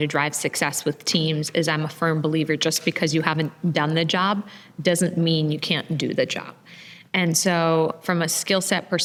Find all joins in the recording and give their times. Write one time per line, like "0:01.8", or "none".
none